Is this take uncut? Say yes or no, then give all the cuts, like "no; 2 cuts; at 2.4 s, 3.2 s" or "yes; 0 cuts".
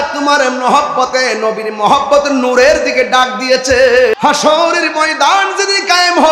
no; 1 cut; at 4.1 s